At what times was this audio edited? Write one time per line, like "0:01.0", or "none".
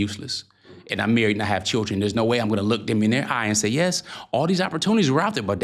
none